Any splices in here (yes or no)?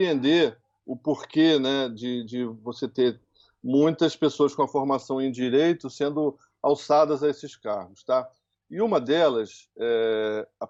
no